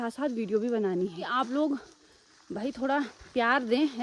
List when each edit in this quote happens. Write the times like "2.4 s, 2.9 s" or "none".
1.4 s